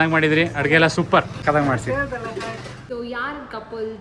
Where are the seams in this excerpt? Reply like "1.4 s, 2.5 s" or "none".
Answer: 1.3 s, 2.7 s